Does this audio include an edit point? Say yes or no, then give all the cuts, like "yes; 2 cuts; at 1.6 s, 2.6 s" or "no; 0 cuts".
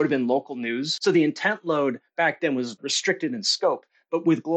yes; 2 cuts; at 0.9 s, 2.9 s